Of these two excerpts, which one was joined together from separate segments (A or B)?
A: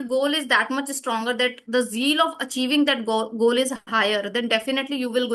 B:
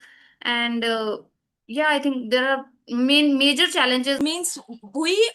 B